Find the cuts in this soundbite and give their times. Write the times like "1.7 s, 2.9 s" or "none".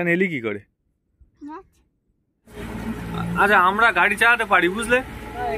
2.6 s

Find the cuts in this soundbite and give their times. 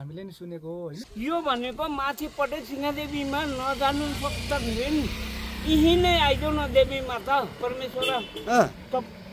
1.0 s

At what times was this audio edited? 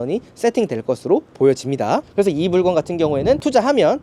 2.1 s

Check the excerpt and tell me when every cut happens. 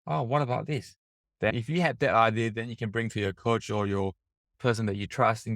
1.5 s, 4.5 s

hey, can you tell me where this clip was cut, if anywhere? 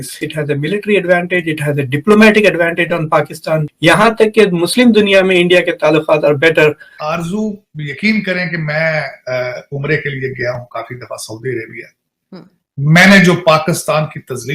3.6 s, 6.9 s

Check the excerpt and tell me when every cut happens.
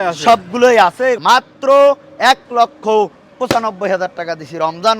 1.2 s

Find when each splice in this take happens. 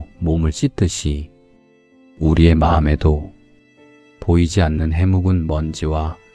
none

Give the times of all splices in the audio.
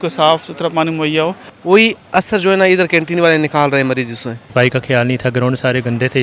1.5 s, 4.4 s

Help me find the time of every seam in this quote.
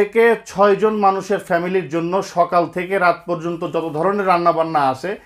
none

